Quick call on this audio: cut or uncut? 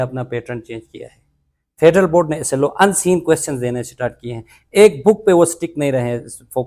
uncut